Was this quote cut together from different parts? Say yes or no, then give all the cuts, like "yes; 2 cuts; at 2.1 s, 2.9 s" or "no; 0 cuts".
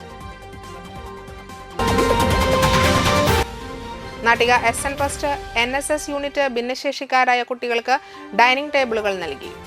yes; 1 cut; at 1.6 s